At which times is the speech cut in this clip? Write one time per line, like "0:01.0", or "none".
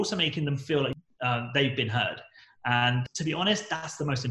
0:00.9
0:03.0